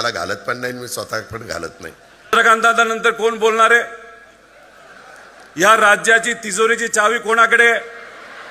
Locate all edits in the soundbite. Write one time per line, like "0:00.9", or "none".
0:02.3